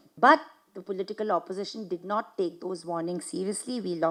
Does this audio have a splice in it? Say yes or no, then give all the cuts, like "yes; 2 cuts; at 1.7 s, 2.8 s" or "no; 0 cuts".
no; 0 cuts